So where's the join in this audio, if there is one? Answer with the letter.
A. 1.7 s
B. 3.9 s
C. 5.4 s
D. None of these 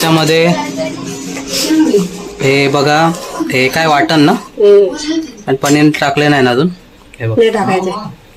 D